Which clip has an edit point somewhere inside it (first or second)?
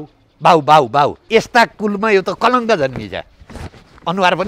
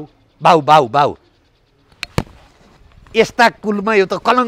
first